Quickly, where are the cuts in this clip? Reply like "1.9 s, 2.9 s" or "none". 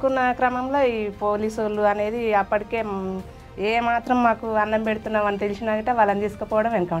none